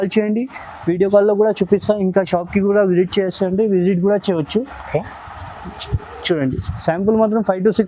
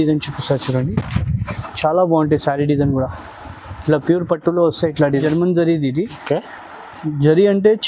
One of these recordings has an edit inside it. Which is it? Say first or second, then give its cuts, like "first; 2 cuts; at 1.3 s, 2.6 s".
second; 1 cut; at 5.2 s